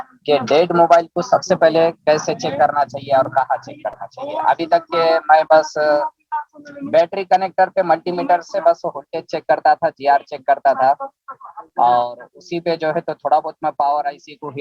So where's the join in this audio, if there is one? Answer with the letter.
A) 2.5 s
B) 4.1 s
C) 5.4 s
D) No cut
D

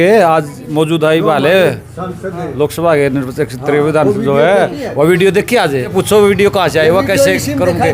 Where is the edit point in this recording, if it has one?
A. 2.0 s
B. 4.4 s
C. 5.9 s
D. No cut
C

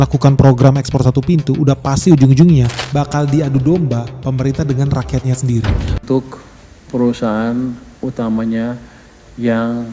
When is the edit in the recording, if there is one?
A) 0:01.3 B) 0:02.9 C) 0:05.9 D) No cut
C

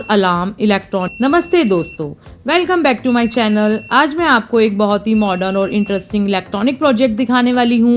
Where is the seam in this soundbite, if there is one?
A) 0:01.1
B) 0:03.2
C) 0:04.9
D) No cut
A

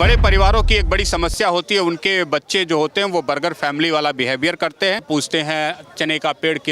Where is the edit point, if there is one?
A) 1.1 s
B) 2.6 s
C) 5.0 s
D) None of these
C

